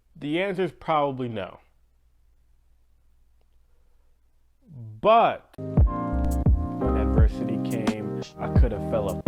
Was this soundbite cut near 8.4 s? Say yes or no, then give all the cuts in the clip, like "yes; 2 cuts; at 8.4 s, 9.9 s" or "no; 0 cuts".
no; 1 cut; at 5.5 s